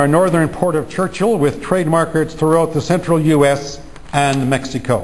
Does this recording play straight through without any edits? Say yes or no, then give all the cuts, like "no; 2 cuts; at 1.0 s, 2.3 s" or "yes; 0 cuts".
yes; 0 cuts